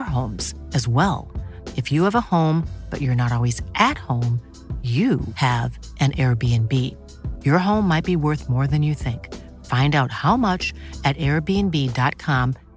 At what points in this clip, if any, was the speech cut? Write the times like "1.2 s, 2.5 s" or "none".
none